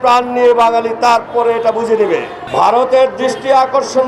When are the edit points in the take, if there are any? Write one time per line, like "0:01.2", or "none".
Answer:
0:02.4

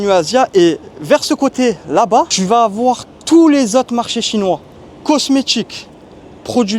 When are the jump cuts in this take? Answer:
0:02.4

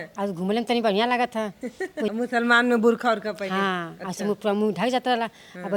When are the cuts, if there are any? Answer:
0:02.1

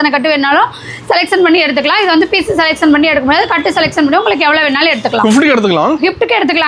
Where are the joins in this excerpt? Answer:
none

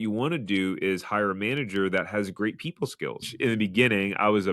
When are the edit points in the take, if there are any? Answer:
0:03.3

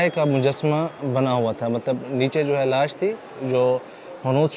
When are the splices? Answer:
none

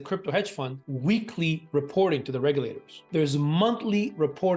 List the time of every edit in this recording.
0:02.9

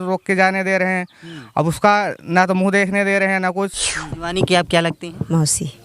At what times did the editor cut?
0:04.3

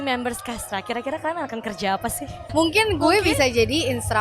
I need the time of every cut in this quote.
0:02.5

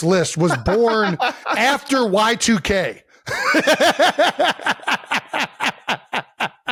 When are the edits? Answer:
none

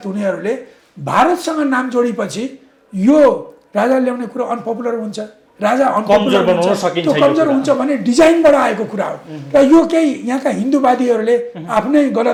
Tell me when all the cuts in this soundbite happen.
none

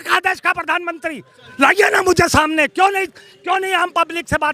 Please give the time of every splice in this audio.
0:01.4

